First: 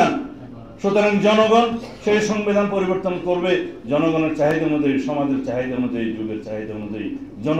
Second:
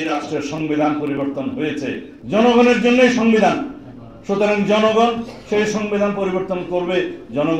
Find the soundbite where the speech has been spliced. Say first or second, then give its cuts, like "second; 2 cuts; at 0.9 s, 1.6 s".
second; 1 cut; at 2.1 s